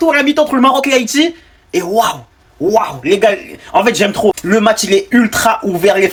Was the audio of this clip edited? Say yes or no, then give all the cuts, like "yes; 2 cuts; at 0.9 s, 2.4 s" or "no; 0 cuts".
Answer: no; 0 cuts